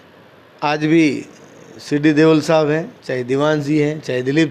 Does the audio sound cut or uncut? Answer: uncut